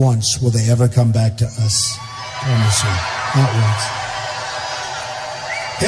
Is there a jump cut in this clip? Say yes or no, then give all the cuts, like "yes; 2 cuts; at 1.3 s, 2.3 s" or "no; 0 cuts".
yes; 1 cut; at 1.7 s